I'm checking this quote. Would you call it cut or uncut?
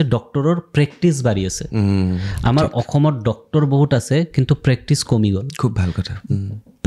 uncut